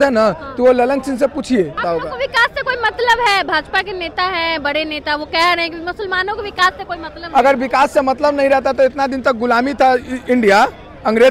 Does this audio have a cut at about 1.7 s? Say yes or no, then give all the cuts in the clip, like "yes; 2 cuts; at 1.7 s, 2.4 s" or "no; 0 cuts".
yes; 1 cut; at 1.7 s